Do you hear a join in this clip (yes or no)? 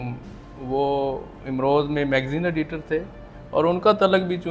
no